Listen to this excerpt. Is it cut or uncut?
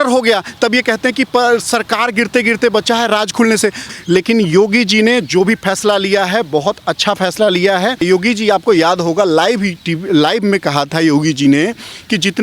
cut